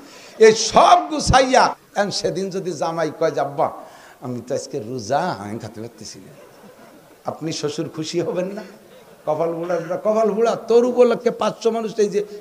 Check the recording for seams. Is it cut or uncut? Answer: cut